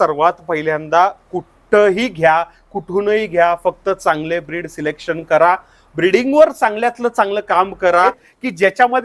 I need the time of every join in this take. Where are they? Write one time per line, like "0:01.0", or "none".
0:07.9